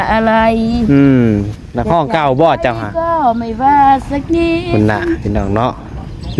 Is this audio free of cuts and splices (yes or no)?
yes